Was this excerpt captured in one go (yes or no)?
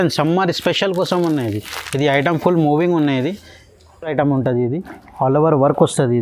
yes